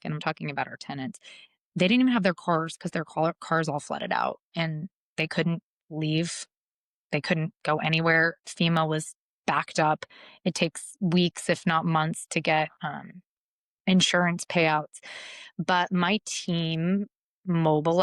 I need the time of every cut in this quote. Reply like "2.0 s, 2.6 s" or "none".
none